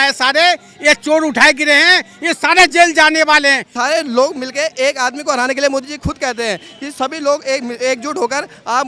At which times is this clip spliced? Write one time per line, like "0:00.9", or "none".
0:03.7